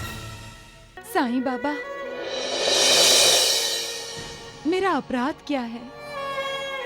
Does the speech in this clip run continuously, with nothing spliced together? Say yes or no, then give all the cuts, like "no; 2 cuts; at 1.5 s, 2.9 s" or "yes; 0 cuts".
no; 1 cut; at 1.0 s